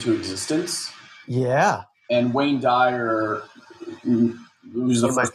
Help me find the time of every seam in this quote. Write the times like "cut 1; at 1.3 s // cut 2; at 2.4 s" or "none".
cut 1; at 1.9 s